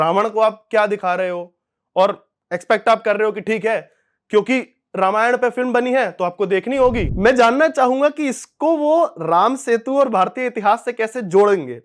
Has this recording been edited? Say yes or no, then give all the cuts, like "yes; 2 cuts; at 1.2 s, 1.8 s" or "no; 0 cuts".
yes; 1 cut; at 7.1 s